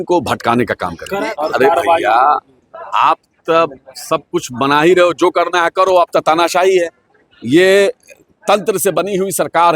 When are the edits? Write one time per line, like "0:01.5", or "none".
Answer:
0:01.0